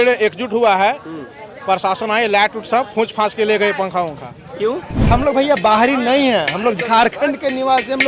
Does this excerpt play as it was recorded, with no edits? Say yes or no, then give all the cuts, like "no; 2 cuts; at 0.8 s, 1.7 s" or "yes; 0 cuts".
no; 1 cut; at 4.9 s